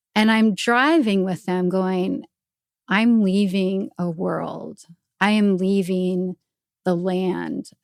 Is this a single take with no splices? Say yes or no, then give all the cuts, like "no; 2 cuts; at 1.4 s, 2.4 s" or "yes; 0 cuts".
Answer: yes; 0 cuts